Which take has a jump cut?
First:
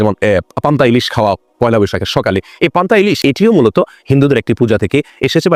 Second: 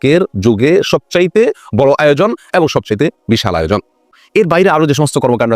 second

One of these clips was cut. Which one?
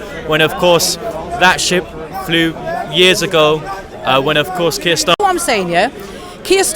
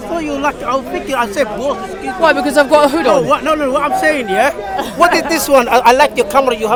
first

